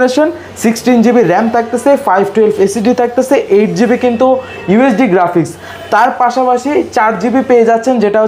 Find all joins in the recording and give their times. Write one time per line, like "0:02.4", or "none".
none